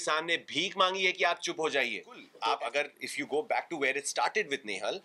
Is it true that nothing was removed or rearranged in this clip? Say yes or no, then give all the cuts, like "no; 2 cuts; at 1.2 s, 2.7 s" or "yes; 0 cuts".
no; 1 cut; at 2.2 s